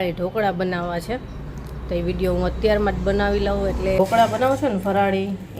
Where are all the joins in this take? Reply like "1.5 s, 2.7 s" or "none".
4.0 s